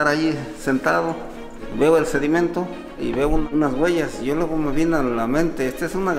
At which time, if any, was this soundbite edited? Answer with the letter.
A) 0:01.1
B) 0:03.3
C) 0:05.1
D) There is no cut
B